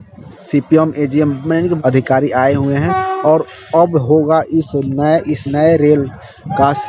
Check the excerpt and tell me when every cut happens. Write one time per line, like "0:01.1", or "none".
0:01.8